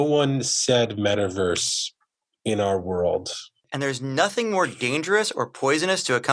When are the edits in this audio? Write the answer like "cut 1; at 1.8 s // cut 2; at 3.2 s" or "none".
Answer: cut 1; at 3.7 s